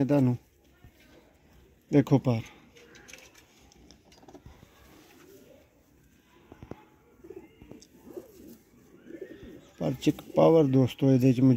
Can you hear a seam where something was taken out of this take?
no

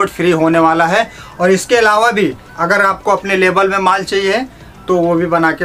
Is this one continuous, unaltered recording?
yes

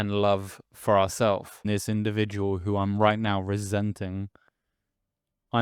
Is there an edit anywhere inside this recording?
yes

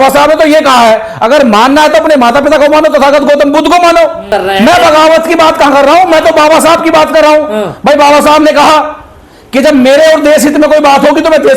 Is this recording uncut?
no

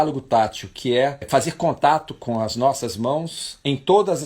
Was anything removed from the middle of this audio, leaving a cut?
yes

